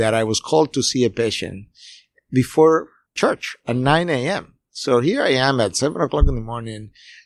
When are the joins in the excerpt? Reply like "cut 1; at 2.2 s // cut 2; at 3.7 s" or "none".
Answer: cut 1; at 3.2 s